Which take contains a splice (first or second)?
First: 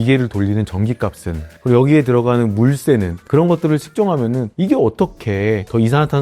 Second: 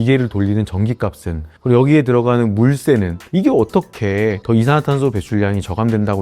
second